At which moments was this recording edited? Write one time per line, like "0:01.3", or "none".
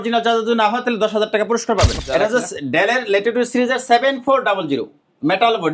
0:01.9